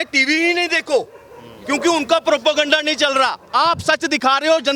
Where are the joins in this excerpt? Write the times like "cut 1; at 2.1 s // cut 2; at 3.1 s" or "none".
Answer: none